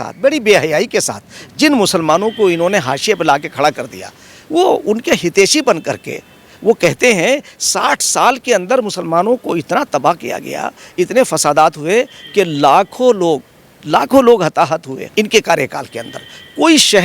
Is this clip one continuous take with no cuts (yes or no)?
no